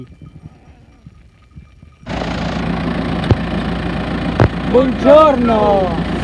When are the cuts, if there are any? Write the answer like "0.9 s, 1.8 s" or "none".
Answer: 2.1 s